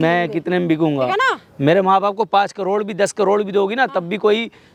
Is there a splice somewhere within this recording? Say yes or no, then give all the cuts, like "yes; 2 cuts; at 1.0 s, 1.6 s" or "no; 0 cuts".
no; 0 cuts